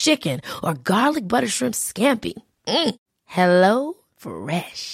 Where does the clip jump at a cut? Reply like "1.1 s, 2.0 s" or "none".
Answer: none